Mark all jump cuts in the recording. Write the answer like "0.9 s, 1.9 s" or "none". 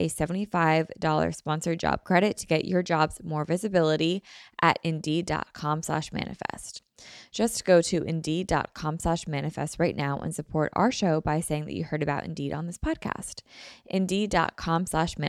none